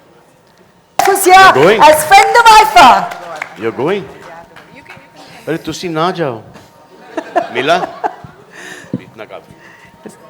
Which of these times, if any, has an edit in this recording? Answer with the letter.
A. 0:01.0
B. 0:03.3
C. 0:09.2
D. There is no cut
A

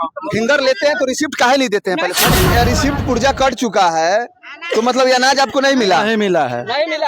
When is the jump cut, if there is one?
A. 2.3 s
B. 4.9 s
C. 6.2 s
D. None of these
A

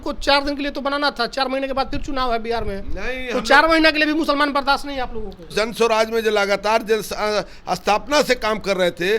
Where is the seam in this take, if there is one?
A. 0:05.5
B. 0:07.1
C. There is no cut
A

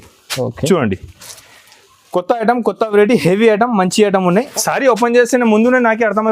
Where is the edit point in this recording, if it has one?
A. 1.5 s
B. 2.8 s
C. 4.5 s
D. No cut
C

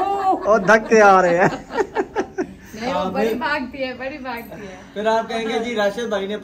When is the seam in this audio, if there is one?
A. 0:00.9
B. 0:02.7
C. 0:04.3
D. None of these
D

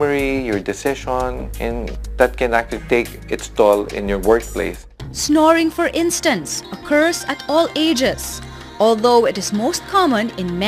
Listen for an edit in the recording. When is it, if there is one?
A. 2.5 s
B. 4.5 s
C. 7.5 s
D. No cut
A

